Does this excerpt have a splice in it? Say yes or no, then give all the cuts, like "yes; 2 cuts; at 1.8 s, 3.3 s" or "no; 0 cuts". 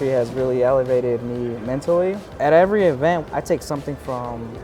yes; 2 cuts; at 2.3 s, 3.2 s